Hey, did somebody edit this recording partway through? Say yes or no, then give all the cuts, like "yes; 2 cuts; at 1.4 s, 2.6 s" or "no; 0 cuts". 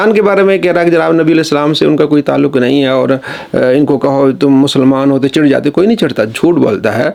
no; 0 cuts